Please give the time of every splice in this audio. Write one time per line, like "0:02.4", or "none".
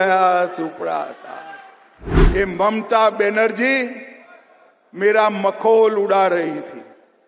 0:02.2

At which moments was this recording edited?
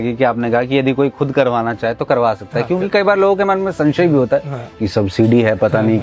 none

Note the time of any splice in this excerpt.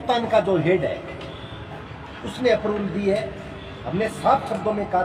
none

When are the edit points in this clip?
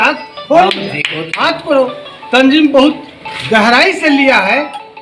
0:01.4

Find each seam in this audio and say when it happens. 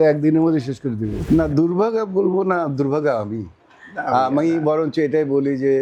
0:01.3

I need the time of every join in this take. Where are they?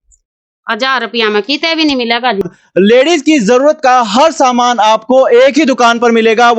0:02.6

